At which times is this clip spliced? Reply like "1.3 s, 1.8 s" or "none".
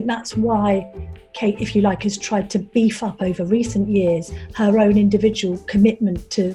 none

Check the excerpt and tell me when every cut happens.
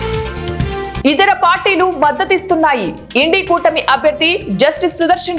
0.9 s

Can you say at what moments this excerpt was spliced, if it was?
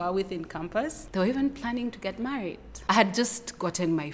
1.0 s, 2.7 s

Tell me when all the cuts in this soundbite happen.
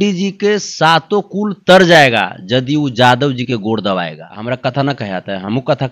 4.3 s

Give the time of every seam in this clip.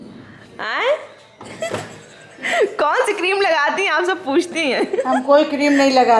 none

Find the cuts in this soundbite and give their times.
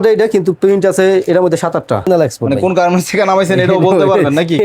2.1 s

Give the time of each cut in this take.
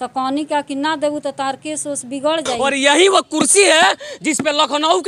2.5 s

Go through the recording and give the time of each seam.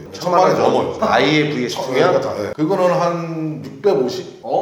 1.0 s, 2.5 s

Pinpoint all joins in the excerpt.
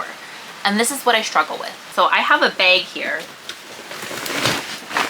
1.8 s

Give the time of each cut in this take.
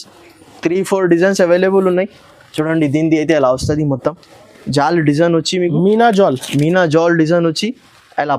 none

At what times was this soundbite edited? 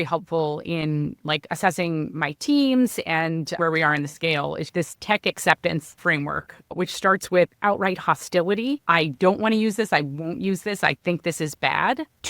3.6 s, 4.6 s, 5.9 s, 8.8 s

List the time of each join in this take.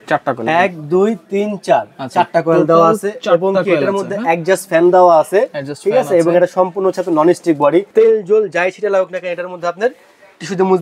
7.9 s

